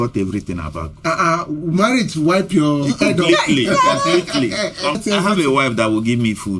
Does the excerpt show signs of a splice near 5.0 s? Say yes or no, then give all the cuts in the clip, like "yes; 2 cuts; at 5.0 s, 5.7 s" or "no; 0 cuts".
yes; 1 cut; at 5.0 s